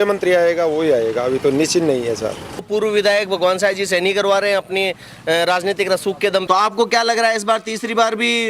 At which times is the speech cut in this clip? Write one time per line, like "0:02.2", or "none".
0:02.7
0:06.4

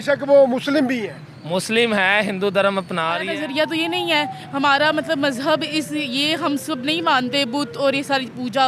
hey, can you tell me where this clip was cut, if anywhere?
0:03.2

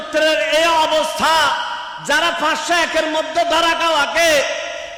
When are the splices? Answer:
none

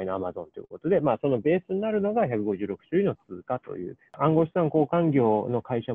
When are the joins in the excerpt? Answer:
0:04.2

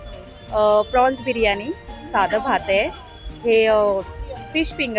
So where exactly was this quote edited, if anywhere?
none

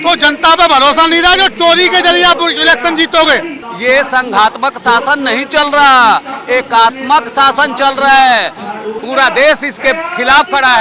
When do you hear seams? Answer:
0:03.6
0:09.0

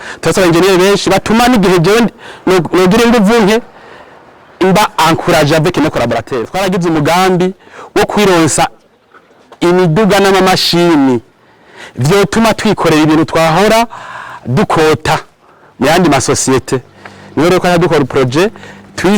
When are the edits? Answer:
0:06.5

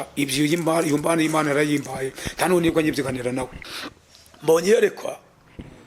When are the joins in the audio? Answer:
0:03.6

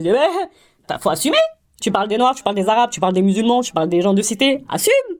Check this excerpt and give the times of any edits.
none

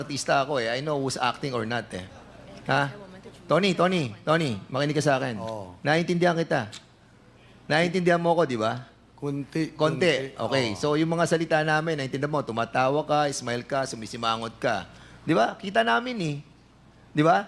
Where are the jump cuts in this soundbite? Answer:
none

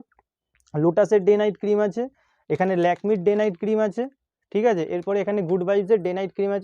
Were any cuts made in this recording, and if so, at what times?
none

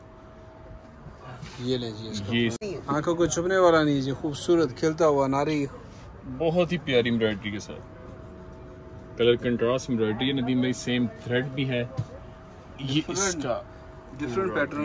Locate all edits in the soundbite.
0:02.6

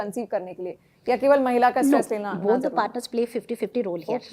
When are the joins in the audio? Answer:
none

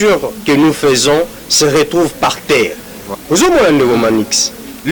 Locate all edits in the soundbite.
0:03.1

